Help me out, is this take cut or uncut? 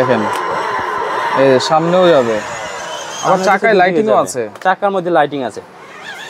uncut